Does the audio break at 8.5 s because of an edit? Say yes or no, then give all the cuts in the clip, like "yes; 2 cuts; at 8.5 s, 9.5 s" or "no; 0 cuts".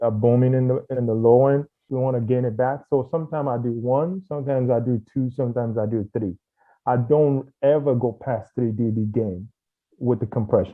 no; 2 cuts; at 0.9 s, 1.8 s